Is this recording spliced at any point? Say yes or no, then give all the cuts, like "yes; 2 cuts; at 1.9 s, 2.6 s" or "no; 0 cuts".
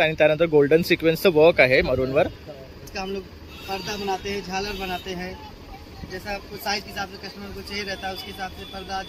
yes; 1 cut; at 2.9 s